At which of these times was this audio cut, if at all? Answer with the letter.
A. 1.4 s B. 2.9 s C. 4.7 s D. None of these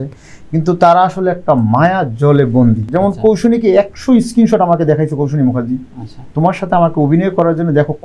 B